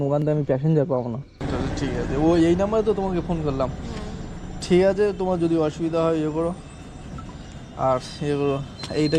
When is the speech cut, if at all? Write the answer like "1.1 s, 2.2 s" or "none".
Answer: 1.4 s